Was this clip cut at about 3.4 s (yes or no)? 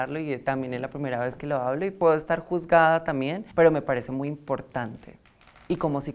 yes